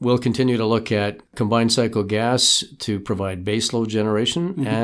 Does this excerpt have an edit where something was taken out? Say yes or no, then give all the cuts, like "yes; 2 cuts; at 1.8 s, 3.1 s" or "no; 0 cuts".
yes; 1 cut; at 1.2 s